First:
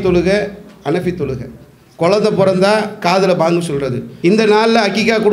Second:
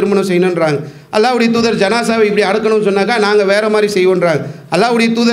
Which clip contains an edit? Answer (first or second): first